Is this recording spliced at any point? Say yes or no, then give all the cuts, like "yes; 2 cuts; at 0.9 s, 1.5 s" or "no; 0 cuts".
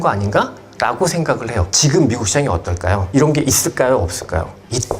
yes; 2 cuts; at 1.7 s, 3.0 s